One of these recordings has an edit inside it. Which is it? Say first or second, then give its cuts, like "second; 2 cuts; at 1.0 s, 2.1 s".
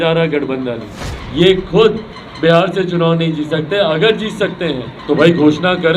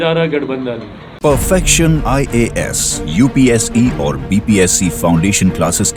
first; 2 cuts; at 1.1 s, 4.9 s